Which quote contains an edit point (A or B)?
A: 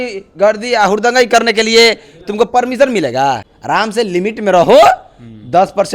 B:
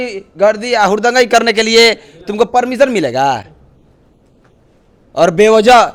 A